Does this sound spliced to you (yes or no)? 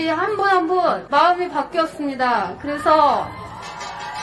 yes